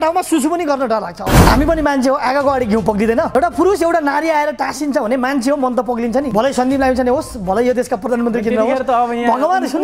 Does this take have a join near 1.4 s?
yes; 3 cuts; at 1.4 s, 3.3 s, 6.3 s

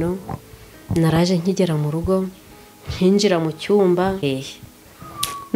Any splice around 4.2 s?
yes; 1 cut; at 4.2 s

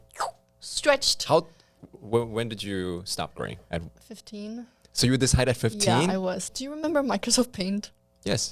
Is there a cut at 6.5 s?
yes; 1 cut; at 6.5 s

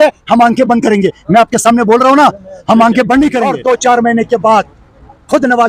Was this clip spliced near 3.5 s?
yes; 1 cut; at 3.5 s

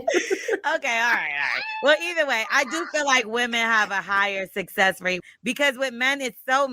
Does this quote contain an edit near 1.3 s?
no; 1 cut; at 5.2 s

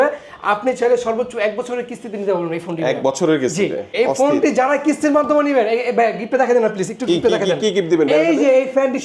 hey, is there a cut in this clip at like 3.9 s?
yes; 1 cut; at 3.9 s

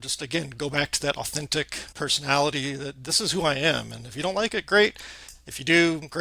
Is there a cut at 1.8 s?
yes; 1 cut; at 1.8 s

